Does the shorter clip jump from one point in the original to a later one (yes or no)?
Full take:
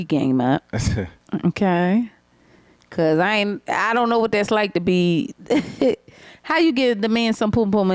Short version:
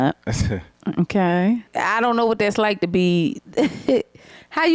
yes